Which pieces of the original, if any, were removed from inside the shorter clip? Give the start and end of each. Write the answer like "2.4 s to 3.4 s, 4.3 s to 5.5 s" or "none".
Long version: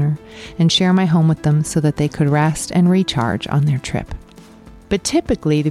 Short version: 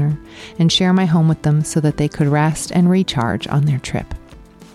none